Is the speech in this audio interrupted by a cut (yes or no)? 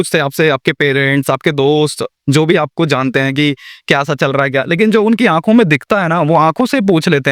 no